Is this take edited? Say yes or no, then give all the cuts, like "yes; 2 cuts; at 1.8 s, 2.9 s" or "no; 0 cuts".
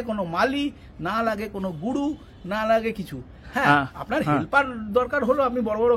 no; 0 cuts